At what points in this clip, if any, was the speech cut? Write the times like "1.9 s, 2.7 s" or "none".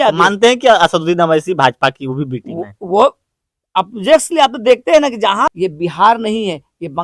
5.5 s